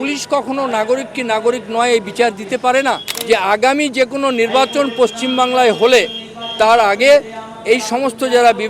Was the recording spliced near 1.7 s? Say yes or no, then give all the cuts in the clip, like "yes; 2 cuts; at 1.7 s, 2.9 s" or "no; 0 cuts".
no; 1 cut; at 3.1 s